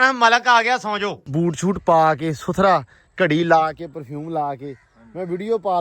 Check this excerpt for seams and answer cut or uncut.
cut